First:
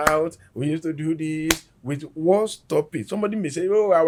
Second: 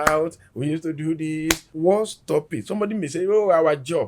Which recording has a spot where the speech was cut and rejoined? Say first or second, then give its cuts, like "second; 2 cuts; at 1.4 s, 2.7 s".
second; 1 cut; at 1.7 s